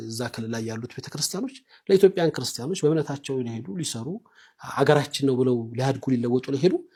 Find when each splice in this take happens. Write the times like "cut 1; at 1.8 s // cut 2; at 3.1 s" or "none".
none